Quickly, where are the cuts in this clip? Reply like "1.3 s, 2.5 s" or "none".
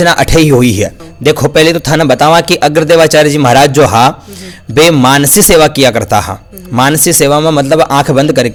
none